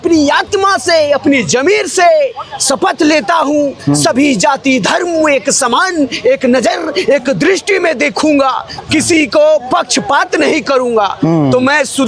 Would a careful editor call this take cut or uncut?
uncut